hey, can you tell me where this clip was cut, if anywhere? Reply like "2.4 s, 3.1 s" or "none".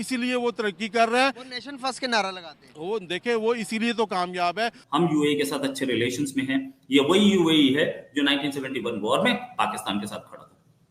none